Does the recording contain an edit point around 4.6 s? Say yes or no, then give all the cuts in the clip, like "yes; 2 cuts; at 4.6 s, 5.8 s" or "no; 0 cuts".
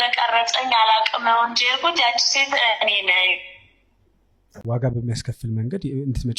yes; 1 cut; at 4.6 s